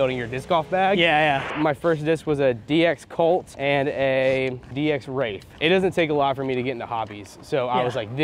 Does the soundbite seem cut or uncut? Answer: cut